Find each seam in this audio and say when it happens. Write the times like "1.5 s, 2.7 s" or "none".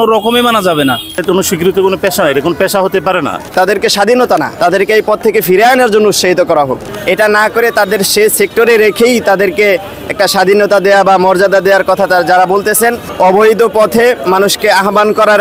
1.2 s, 3.5 s, 4.5 s, 6.9 s, 13.0 s